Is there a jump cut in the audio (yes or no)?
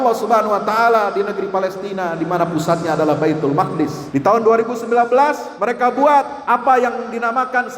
yes